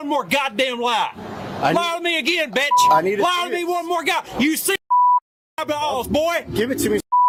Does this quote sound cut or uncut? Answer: uncut